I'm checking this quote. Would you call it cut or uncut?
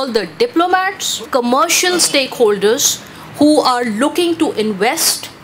cut